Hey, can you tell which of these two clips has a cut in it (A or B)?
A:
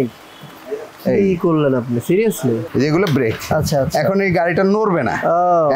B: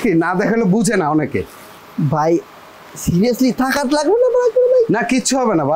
A